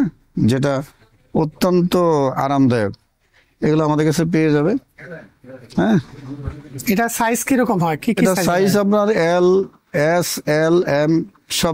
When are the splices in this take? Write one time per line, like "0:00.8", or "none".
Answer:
none